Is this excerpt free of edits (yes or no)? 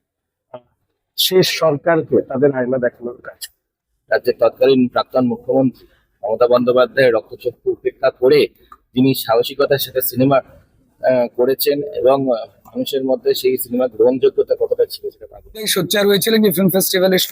no